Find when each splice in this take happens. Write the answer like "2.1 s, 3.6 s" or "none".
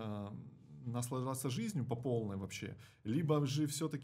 none